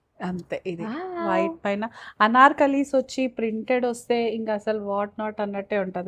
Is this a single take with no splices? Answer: yes; 0 cuts

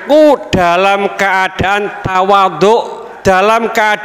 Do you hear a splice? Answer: yes; 1 cut; at 3.0 s

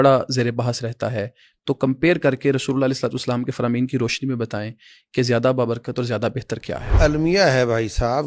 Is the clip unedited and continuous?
no; 1 cut; at 6.9 s

